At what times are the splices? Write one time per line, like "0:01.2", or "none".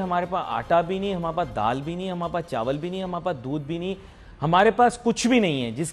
none